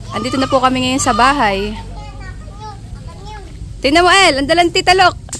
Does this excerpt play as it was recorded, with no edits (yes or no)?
yes